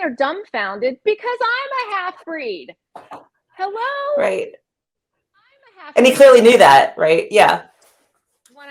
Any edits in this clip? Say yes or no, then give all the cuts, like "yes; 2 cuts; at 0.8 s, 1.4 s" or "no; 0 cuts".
no; 0 cuts